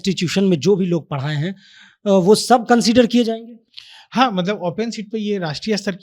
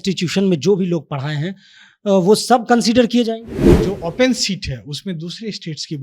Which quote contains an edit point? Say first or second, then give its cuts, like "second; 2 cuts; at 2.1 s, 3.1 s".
second; 1 cut; at 3.8 s